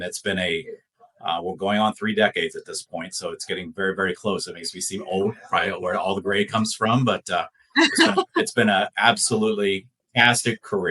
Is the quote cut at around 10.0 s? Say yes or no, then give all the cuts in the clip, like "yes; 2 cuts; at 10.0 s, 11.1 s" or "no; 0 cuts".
yes; 1 cut; at 10.0 s